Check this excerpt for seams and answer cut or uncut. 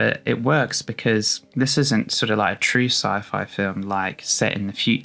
uncut